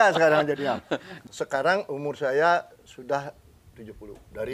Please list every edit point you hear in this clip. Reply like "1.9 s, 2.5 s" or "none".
1.2 s